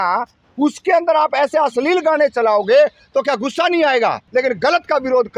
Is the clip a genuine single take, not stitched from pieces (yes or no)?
no